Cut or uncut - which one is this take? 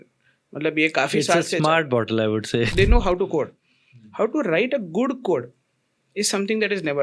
cut